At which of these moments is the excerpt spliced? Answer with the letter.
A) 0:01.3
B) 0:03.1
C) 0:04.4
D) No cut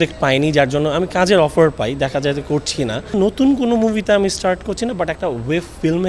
B